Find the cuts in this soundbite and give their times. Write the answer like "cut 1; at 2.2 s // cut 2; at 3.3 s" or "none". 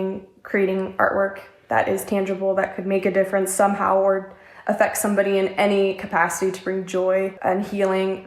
cut 1; at 7.3 s

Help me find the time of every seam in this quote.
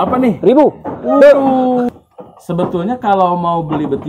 cut 1; at 1.9 s

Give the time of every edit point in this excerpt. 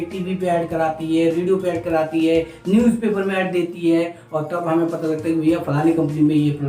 none

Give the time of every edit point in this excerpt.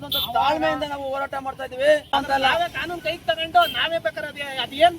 cut 1; at 2.1 s

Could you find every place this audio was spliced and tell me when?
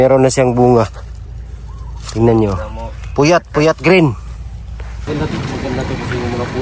cut 1; at 5.0 s

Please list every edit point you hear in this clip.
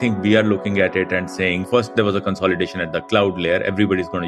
cut 1; at 1.6 s

